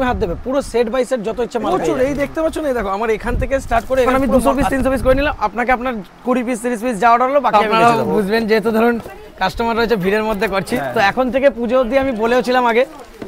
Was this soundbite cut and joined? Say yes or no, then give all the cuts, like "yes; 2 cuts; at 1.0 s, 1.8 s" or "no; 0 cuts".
yes; 3 cuts; at 1.7 s, 4.1 s, 7.5 s